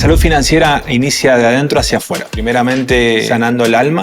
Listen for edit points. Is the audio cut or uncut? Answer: cut